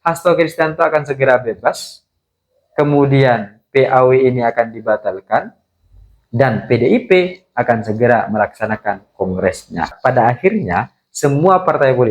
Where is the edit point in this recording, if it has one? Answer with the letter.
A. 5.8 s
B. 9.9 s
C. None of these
B